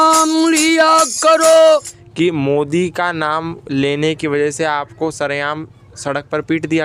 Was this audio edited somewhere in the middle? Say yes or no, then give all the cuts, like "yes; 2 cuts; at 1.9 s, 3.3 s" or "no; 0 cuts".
yes; 1 cut; at 2.0 s